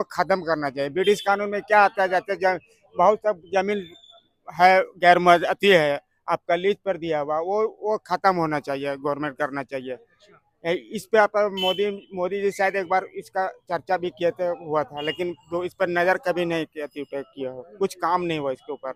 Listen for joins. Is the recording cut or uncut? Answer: uncut